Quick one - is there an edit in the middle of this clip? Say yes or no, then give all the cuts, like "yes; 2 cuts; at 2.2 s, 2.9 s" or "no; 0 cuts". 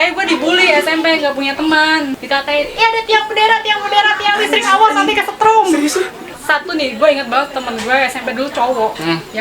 yes; 2 cuts; at 2.2 s, 6.3 s